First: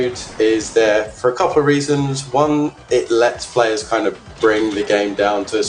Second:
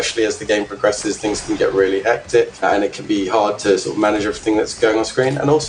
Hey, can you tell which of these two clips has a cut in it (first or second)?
second